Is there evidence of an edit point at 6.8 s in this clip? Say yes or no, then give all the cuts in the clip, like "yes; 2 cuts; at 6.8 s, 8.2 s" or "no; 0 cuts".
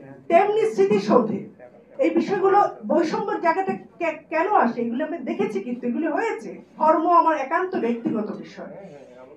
yes; 1 cut; at 6.8 s